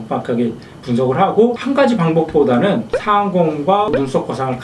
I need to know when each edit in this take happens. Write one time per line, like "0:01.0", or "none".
0:01.6
0:02.9